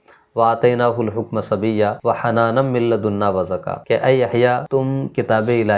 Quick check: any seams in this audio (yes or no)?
yes